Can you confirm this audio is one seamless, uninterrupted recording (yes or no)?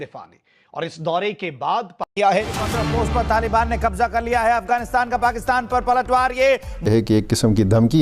no